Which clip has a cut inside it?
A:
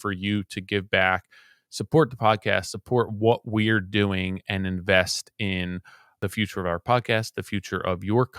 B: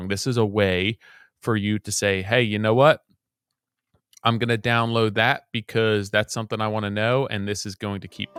A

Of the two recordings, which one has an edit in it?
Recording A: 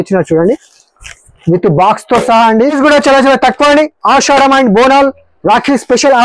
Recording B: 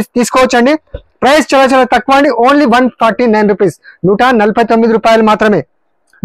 A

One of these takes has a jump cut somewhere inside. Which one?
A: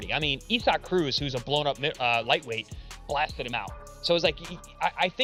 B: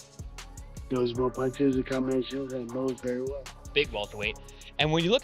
B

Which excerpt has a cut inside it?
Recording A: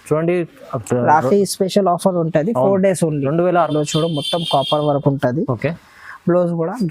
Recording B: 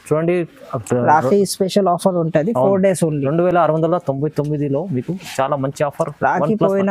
A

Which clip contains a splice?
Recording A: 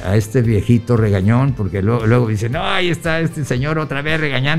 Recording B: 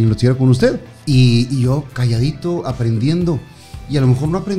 B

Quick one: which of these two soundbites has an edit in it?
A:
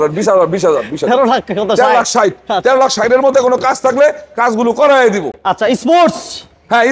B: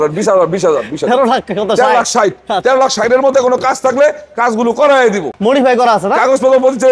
B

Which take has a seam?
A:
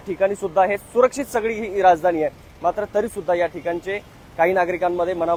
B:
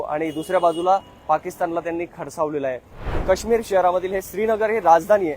B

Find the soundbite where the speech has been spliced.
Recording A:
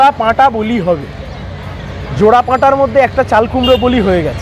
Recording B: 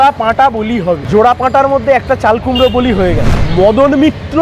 B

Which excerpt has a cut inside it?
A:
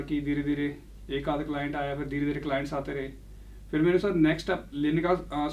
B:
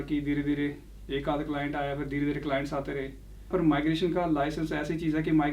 B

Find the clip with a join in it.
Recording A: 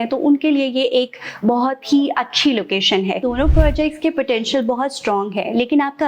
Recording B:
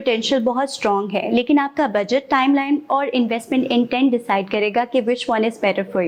A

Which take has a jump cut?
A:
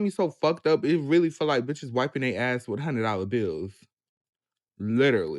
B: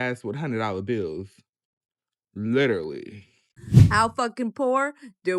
B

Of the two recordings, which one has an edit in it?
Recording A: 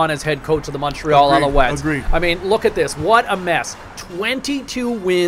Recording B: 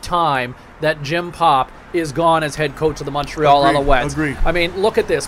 A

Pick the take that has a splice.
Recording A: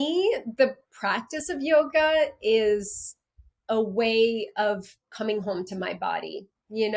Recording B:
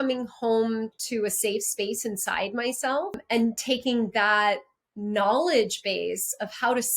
B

